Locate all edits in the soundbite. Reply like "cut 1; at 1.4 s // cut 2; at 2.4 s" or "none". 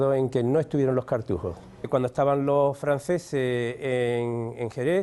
cut 1; at 1.8 s